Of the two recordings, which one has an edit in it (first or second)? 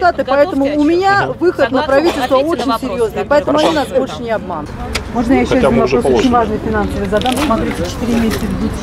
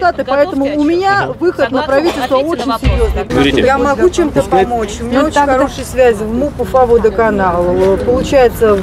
second